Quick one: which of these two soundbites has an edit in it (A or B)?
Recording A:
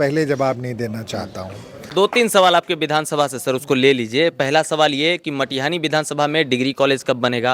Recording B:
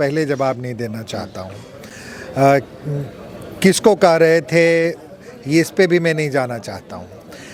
A